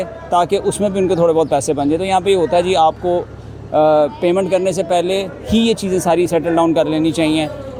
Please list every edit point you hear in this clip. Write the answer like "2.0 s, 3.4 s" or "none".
none